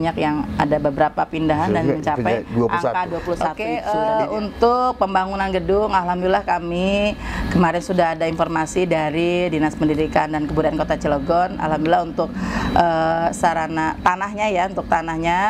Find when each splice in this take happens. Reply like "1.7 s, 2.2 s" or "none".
3.6 s